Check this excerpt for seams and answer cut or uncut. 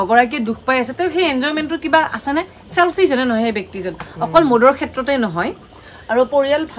uncut